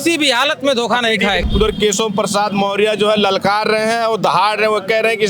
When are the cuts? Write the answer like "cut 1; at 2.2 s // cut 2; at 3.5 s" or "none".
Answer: cut 1; at 1.4 s

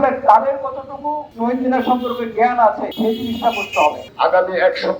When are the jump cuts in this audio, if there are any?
cut 1; at 1.2 s // cut 2; at 2.9 s // cut 3; at 4.1 s

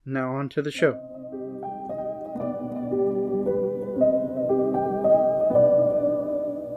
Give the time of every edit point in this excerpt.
cut 1; at 1.0 s

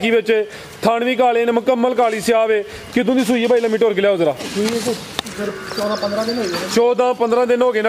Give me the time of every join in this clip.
none

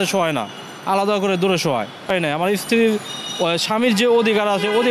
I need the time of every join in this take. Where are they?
cut 1; at 2.1 s

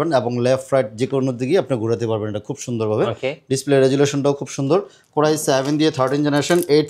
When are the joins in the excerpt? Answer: cut 1; at 5.0 s

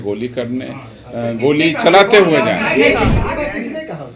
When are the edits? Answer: cut 1; at 3.1 s

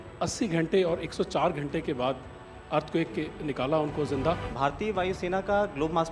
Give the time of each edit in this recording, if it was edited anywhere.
cut 1; at 4.5 s

